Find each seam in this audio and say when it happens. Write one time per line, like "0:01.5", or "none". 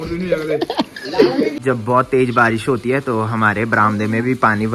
0:01.6